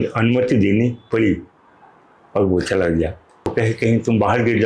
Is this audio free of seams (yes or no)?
no